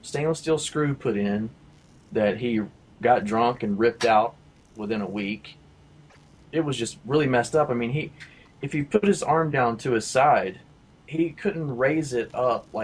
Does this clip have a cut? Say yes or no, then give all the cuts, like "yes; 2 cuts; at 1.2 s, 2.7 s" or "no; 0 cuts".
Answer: yes; 1 cut; at 7.7 s